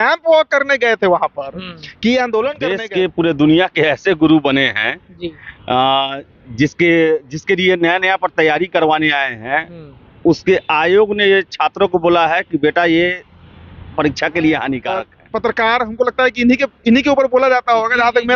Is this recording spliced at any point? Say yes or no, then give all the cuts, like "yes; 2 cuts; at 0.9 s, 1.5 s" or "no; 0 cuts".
yes; 2 cuts; at 2.7 s, 15.2 s